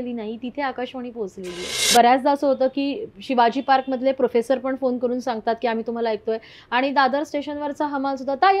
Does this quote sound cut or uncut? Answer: cut